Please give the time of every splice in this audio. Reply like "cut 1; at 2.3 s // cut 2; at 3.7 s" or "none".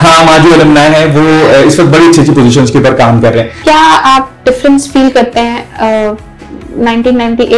cut 1; at 3.5 s